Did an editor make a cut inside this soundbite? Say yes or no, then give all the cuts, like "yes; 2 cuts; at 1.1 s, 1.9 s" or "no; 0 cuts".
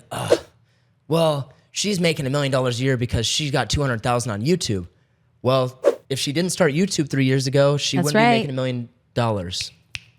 no; 0 cuts